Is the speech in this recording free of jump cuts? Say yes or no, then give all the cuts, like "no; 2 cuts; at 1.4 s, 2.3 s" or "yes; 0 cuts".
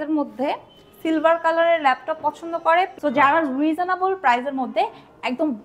no; 1 cut; at 2.9 s